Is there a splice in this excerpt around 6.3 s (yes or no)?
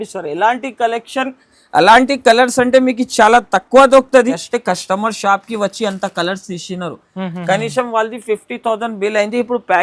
no